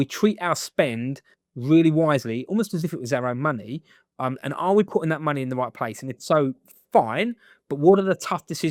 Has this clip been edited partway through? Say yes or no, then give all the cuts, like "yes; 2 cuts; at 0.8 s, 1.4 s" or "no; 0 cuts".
no; 0 cuts